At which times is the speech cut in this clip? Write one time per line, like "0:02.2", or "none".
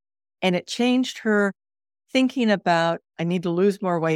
0:03.1

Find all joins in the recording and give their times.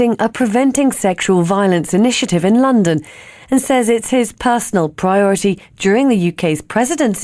0:02.3

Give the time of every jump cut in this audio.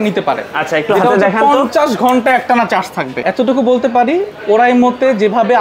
0:03.1

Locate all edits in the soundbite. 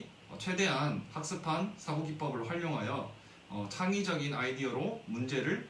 none

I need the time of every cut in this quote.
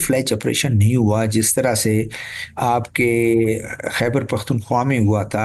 none

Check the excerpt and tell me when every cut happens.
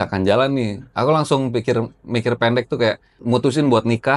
0:03.1

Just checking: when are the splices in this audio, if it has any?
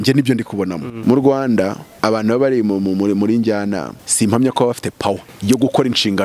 0:00.9
0:01.9
0:04.0
0:05.3

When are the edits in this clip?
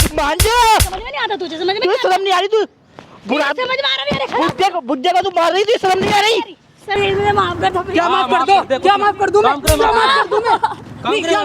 0:06.9

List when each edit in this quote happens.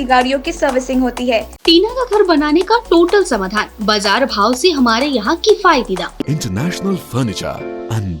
0:01.5
0:06.2

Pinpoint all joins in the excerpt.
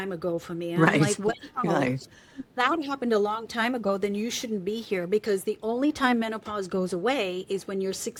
none

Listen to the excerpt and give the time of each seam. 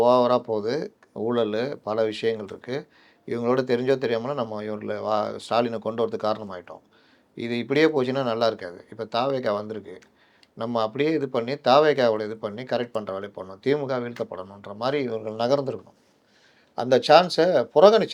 none

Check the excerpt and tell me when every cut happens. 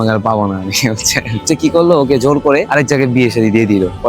0:01.4
0:02.7

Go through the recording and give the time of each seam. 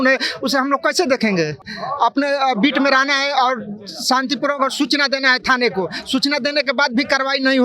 0:01.8

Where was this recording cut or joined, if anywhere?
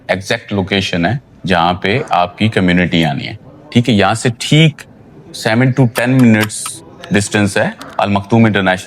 none

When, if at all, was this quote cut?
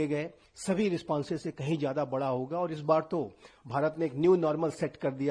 none

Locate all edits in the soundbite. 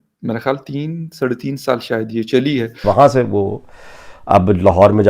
0:02.8

